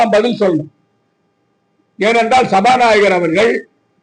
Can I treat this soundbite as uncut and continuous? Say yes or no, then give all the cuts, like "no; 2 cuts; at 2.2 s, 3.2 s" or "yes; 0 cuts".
yes; 0 cuts